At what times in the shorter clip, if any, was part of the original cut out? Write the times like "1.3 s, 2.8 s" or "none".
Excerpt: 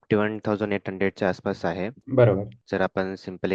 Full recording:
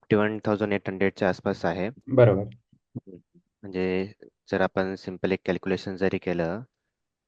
2.6 s